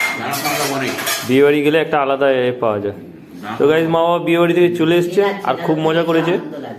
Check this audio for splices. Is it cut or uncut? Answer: uncut